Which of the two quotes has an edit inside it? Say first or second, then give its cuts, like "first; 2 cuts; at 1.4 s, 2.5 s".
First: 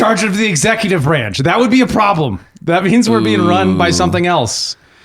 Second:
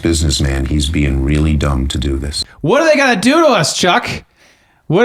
second; 1 cut; at 2.3 s